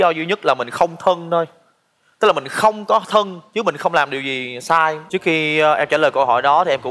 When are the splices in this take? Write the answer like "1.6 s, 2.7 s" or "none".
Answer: 5.0 s